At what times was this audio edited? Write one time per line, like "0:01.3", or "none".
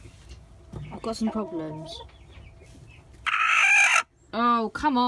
none

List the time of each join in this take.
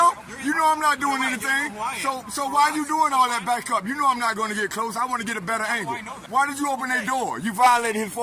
0:06.2

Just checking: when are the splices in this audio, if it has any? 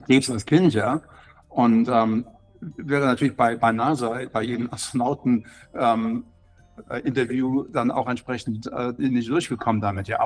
none

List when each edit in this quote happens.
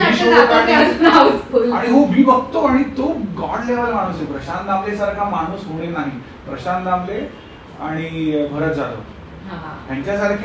none

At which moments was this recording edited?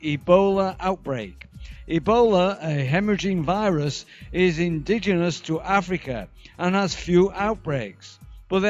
none

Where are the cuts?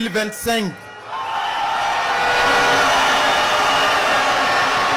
none

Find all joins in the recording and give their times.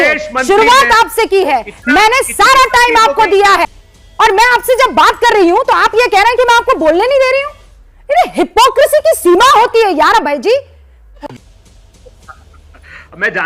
none

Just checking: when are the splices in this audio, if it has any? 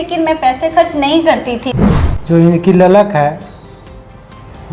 0:01.7

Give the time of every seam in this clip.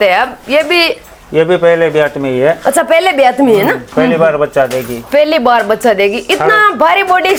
none

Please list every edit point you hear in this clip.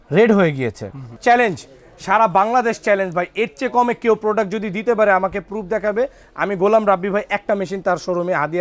0:01.2

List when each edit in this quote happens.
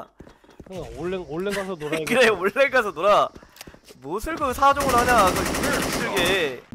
none

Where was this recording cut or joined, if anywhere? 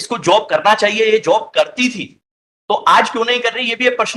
none

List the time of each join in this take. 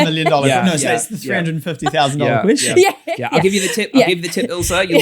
none

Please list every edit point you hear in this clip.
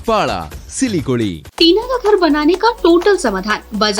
0:01.4

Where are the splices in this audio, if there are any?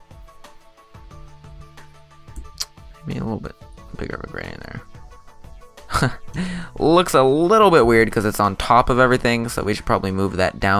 none

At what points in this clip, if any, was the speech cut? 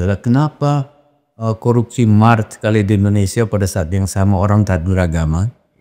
none

